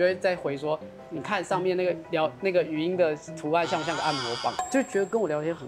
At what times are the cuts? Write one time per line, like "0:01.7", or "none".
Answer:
0:04.6